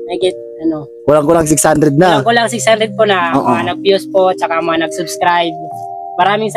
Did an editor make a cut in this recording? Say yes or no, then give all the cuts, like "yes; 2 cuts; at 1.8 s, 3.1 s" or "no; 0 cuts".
no; 0 cuts